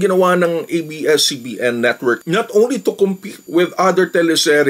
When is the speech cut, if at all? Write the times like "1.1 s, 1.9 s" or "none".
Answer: 2.2 s